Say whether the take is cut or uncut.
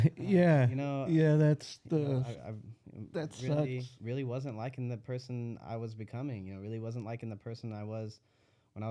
cut